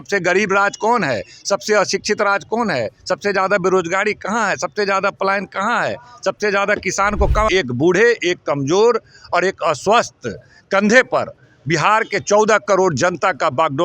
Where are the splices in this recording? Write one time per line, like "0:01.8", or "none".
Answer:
0:07.5

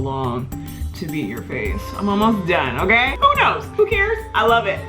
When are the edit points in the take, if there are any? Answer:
0:03.1

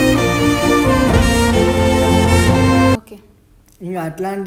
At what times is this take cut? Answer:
none

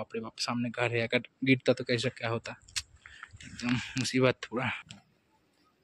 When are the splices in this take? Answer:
none

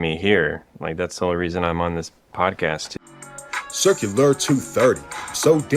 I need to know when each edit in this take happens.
0:02.9

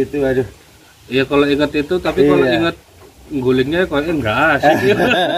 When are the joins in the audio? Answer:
none

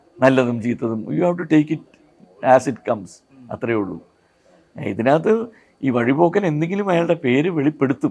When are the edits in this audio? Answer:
none

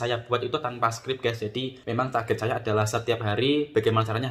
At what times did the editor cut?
0:01.8

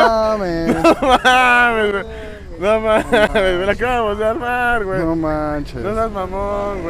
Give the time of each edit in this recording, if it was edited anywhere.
none

